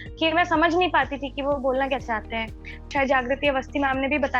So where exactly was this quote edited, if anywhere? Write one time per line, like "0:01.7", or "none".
0:02.9